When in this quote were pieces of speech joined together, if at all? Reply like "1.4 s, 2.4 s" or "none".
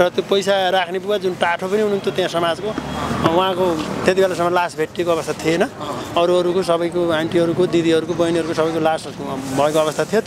none